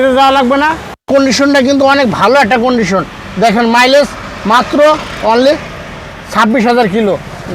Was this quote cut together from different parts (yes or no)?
yes